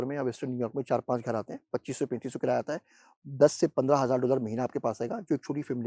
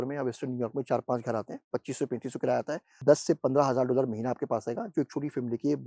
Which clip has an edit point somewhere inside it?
second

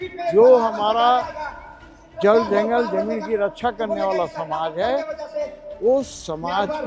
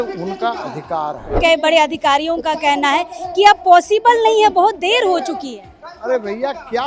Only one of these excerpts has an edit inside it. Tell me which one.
second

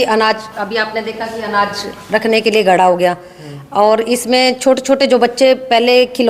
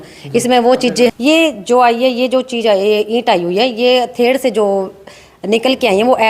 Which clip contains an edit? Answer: second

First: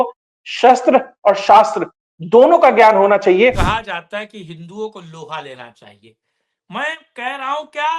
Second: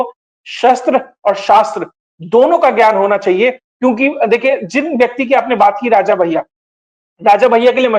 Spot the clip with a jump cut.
first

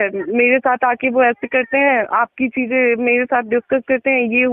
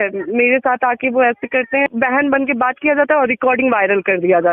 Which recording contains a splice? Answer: second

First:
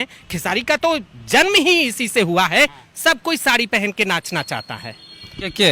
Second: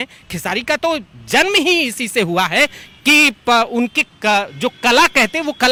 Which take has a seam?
first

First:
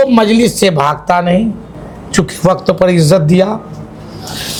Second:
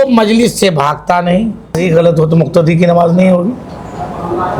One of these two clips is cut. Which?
second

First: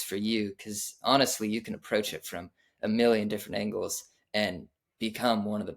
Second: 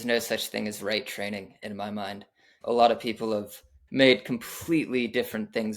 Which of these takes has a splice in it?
second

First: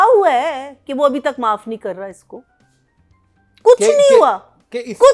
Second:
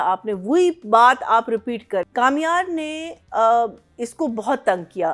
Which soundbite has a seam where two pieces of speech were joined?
second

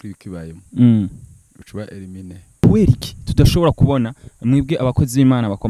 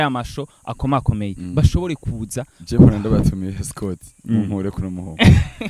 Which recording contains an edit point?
first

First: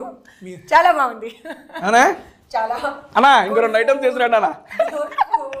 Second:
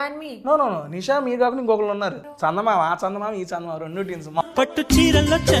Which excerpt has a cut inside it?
second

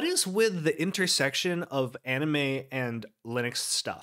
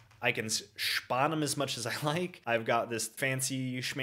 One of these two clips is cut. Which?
second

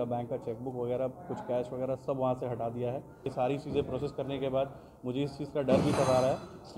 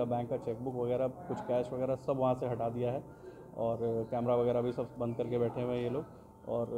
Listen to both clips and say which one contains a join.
first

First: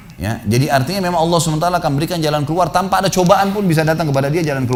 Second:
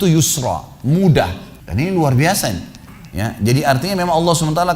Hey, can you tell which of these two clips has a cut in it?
second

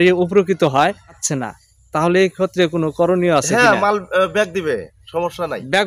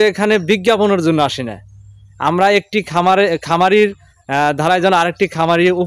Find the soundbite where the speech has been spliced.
first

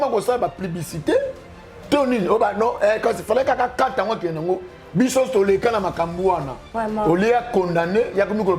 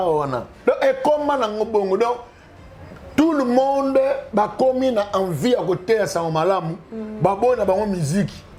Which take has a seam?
first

